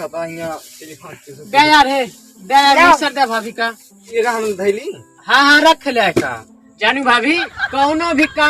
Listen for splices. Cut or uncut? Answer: cut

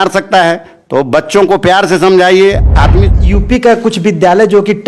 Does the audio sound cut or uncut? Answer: cut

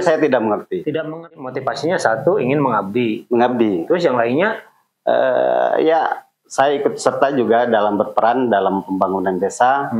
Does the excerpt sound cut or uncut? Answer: cut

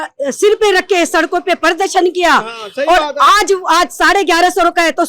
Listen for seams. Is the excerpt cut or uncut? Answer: uncut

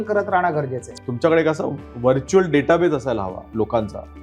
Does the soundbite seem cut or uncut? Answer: cut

